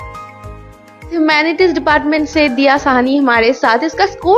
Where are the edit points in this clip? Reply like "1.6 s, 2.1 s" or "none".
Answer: 1.2 s